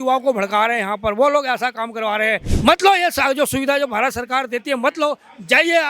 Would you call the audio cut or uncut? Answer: cut